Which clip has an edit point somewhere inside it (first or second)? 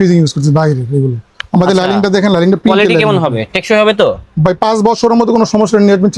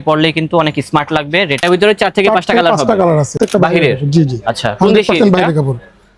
second